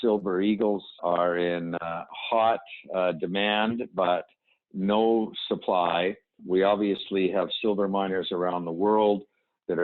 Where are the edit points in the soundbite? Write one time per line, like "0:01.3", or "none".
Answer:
0:01.0
0:06.4